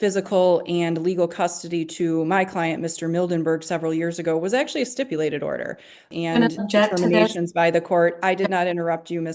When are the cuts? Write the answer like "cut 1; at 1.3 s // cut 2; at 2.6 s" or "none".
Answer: cut 1; at 6.1 s